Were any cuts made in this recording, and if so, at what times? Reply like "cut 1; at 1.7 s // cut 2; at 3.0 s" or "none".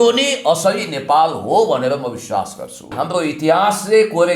cut 1; at 3.0 s